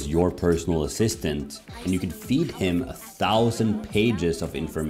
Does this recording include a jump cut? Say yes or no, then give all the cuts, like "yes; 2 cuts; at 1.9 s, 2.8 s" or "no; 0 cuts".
no; 0 cuts